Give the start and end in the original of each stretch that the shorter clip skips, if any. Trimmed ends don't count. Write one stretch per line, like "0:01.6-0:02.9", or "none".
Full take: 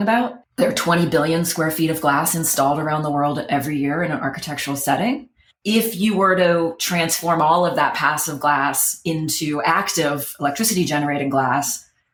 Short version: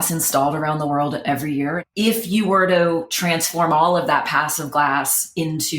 0:04.1-0:05.5